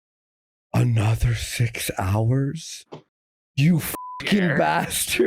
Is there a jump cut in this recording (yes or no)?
no